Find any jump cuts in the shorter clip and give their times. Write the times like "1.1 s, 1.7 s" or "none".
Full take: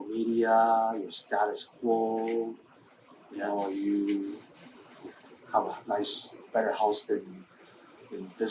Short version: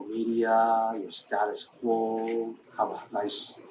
2.6 s